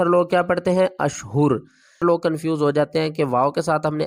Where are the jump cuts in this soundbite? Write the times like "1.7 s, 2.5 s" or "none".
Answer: 2.0 s